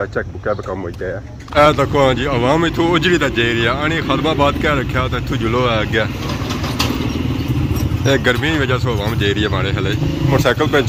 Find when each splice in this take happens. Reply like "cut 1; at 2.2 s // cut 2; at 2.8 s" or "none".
none